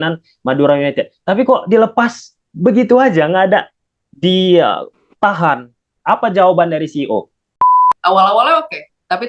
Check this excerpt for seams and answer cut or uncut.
cut